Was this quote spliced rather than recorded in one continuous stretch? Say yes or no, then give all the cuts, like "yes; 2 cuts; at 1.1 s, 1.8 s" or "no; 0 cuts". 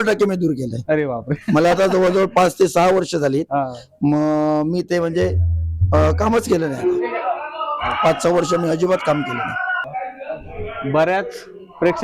yes; 1 cut; at 9.8 s